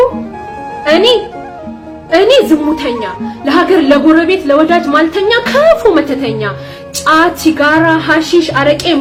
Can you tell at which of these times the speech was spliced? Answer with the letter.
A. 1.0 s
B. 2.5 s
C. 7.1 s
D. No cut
D